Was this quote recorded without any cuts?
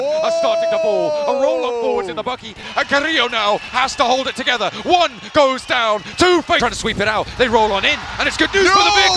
no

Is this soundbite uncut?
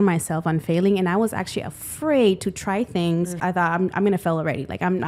no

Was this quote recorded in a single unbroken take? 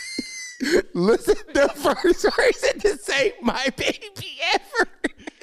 no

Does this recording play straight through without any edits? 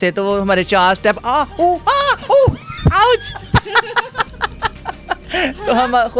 yes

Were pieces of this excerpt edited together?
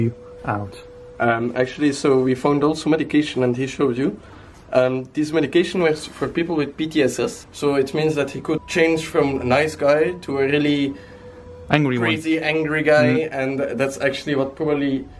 yes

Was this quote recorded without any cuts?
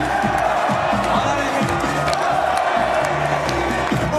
yes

